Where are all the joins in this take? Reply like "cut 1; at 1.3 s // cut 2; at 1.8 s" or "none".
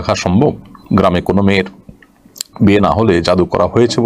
none